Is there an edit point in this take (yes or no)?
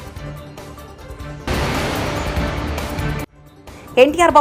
yes